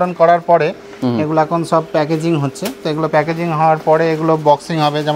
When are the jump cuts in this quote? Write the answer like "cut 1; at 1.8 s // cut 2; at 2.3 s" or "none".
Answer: none

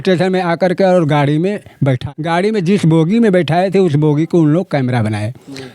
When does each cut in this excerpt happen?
cut 1; at 2.1 s

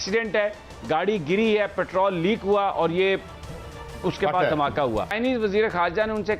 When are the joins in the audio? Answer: cut 1; at 5.1 s

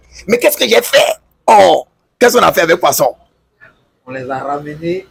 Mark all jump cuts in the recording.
none

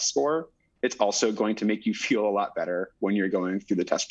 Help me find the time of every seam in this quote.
none

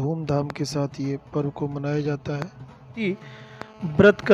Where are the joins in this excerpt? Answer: cut 1; at 3.0 s

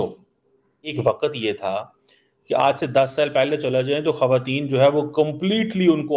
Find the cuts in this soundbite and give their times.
cut 1; at 0.9 s

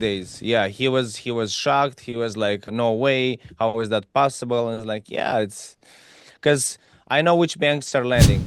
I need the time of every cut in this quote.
cut 1; at 2.7 s

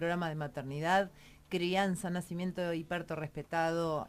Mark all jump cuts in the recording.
cut 1; at 1.8 s

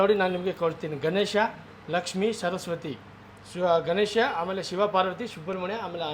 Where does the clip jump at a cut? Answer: none

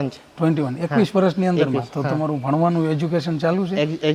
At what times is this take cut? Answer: none

